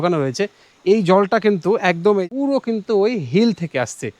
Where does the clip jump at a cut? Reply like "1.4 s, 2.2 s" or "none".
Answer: 2.2 s